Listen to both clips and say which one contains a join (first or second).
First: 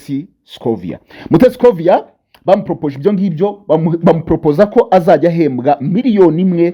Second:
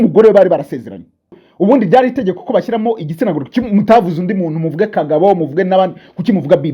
second